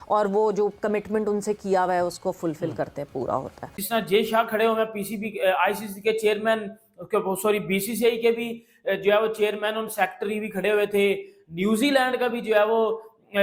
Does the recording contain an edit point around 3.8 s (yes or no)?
yes